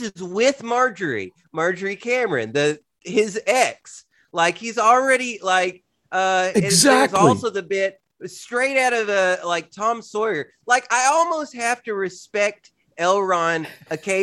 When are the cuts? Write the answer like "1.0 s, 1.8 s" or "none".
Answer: none